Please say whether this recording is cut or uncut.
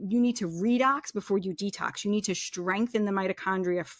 uncut